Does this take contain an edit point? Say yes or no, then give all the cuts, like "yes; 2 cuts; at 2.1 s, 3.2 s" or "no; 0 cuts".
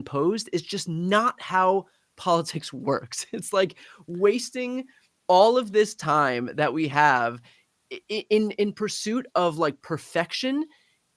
no; 0 cuts